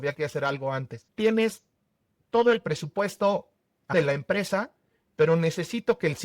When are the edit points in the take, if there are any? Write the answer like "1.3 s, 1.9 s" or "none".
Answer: 1.0 s, 3.9 s